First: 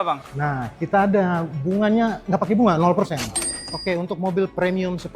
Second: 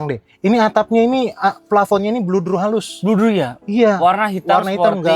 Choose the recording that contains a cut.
first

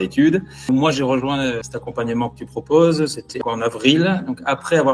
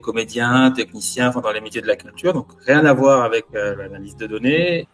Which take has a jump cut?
first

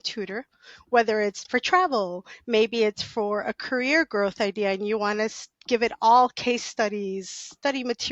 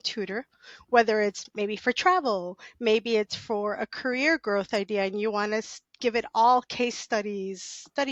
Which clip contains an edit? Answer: first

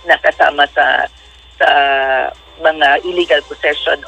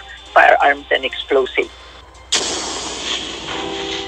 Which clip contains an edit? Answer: second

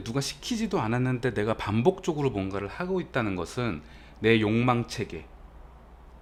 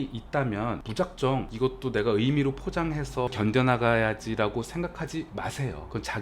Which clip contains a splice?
second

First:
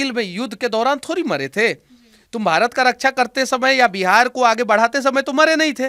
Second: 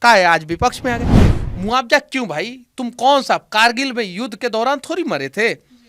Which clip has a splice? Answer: second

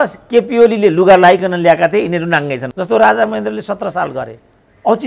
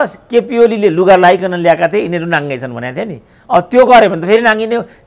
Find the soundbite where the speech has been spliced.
first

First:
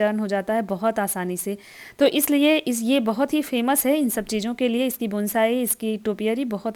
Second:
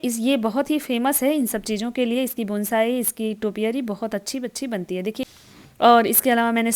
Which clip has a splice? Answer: second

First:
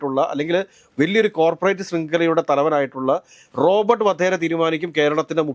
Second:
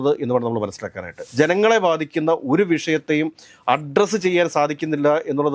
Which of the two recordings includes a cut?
second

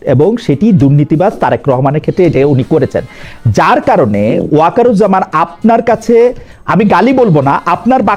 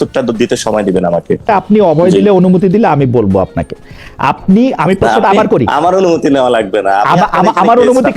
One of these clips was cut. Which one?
second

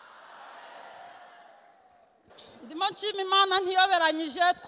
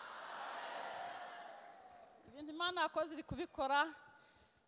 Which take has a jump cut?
first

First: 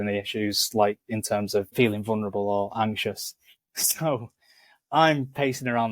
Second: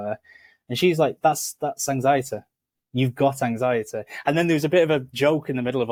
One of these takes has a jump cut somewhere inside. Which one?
first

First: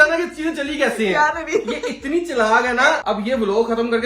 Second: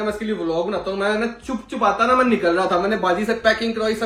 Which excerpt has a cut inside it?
first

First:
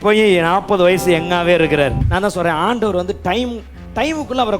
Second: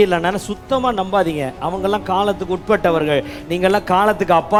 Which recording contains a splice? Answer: first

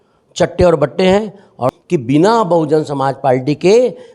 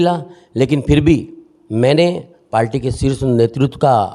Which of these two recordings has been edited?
first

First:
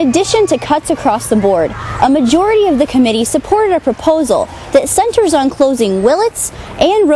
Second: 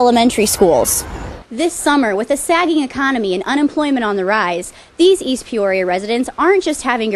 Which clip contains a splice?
second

